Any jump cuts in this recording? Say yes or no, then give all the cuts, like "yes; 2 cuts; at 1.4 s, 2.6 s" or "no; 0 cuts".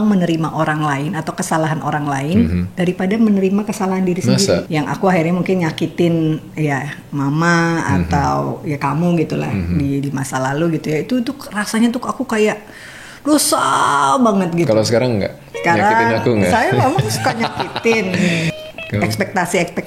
yes; 2 cuts; at 4.7 s, 18.5 s